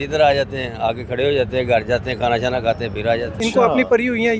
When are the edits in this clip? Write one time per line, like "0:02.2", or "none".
0:03.4